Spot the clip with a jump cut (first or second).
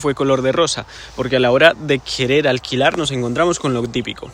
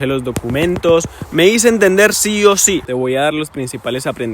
second